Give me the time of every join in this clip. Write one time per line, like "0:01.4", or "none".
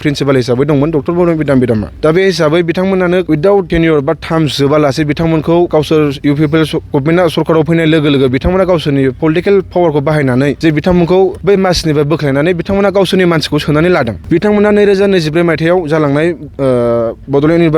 0:01.9
0:03.5
0:05.7
0:10.6
0:11.4
0:14.2